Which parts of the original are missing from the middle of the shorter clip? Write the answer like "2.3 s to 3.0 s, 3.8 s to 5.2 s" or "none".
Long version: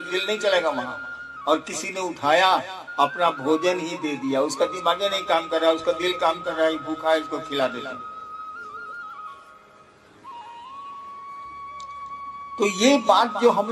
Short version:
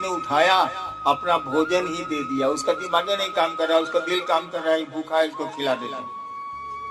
7.9 s to 10.9 s

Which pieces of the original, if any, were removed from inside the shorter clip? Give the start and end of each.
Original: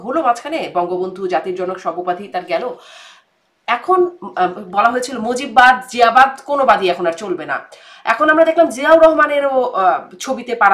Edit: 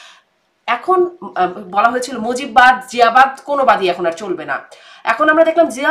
none

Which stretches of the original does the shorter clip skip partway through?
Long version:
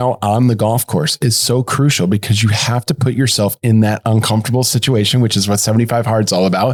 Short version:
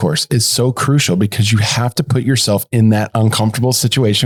none

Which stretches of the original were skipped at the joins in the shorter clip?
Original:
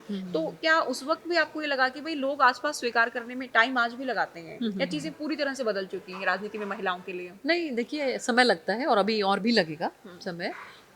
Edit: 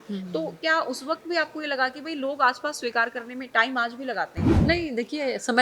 4.5 s to 7.3 s

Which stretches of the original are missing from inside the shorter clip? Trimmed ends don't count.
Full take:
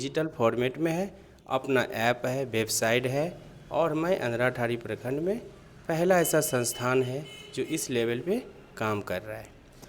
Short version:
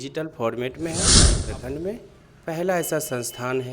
1.3 s to 4.7 s

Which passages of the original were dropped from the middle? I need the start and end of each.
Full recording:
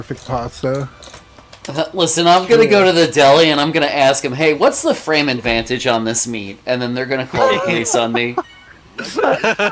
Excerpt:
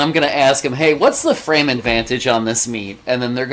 none

